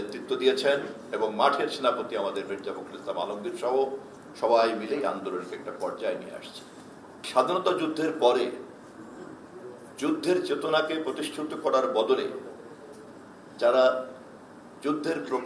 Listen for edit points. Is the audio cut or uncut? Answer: cut